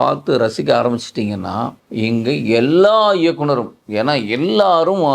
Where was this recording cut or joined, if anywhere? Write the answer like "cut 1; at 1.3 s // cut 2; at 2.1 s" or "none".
cut 1; at 1.8 s // cut 2; at 3.8 s

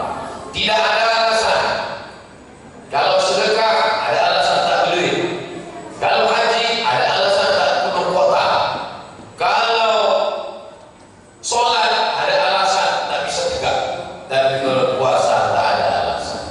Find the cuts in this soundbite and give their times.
none

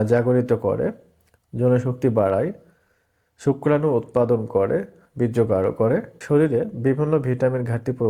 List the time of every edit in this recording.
cut 1; at 6.1 s

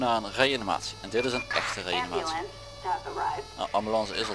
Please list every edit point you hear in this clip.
none

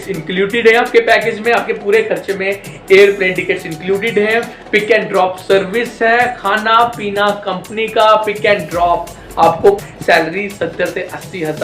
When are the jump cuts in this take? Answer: cut 1; at 9.9 s

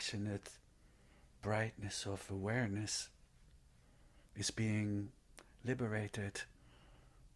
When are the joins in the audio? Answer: none

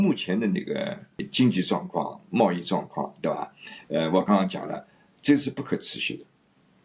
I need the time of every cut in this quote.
cut 1; at 1.3 s

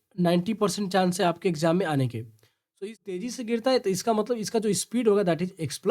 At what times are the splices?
cut 1; at 2.7 s

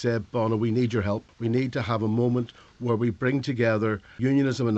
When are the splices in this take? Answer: cut 1; at 1.3 s

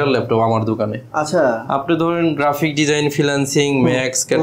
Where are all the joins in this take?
none

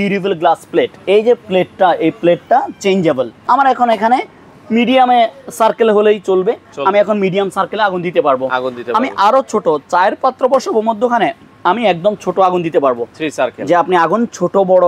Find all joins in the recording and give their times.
cut 1; at 3.3 s // cut 2; at 13.2 s

